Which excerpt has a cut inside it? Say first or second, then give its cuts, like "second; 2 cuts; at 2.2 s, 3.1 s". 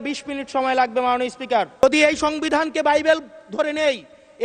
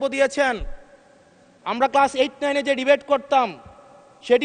first; 1 cut; at 1.8 s